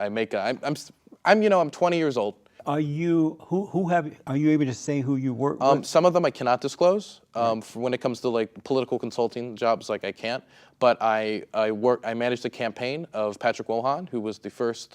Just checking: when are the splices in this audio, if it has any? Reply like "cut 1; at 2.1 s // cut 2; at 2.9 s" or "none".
cut 1; at 2.5 s